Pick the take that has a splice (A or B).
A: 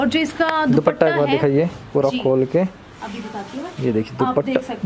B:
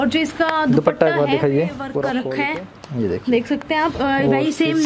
B